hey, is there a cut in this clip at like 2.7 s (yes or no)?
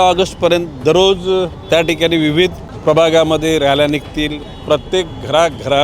yes